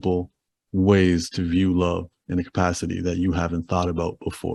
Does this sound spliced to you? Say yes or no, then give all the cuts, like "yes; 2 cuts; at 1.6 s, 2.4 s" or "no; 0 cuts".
no; 0 cuts